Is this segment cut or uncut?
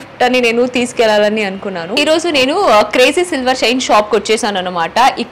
cut